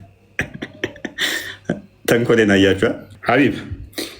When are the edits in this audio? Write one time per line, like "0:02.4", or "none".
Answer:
0:03.1